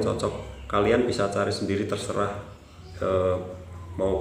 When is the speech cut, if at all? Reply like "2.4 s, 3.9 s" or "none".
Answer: none